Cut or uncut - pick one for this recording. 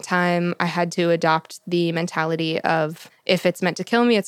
cut